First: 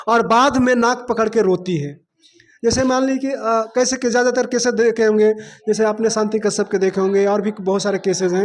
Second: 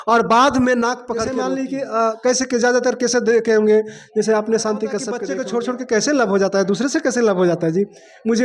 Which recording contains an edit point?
second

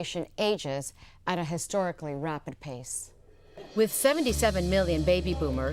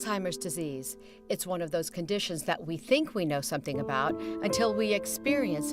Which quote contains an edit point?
first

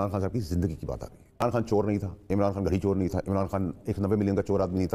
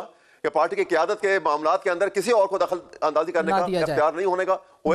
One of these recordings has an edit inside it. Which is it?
first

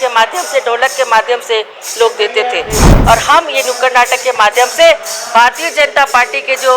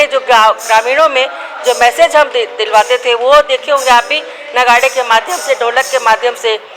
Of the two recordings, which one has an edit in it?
first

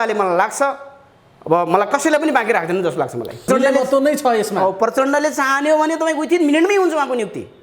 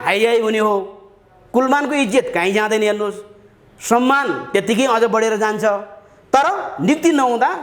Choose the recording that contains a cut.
first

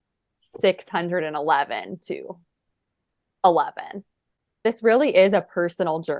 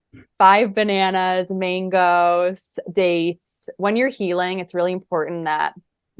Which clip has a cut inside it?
first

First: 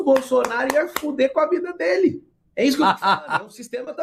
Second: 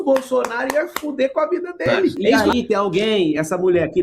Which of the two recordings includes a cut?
second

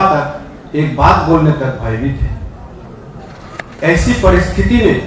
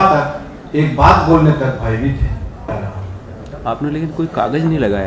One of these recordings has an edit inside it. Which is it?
second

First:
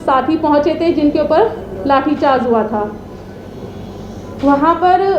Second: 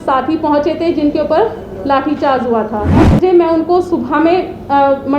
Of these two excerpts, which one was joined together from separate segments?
second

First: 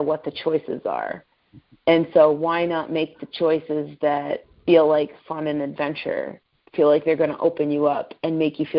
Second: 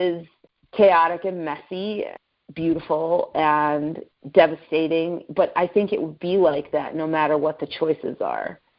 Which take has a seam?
second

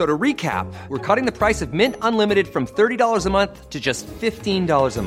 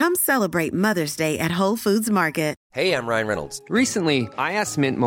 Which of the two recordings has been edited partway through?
second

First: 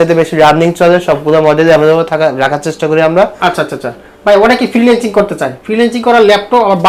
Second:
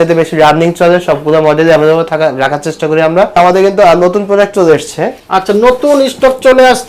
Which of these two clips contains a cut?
second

